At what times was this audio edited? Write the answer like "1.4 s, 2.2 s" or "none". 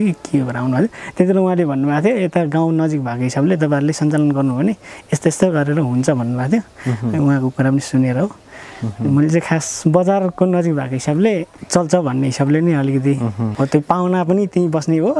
11.6 s, 13.4 s